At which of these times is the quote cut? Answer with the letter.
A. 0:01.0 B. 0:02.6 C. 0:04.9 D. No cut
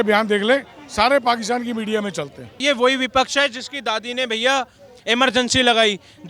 B